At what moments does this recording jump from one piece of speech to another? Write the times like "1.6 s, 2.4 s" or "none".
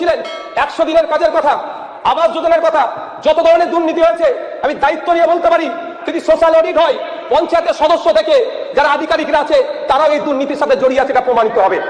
none